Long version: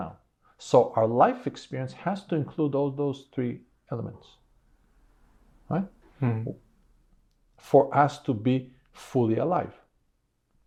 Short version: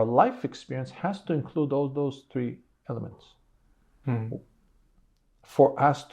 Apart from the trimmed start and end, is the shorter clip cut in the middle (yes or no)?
yes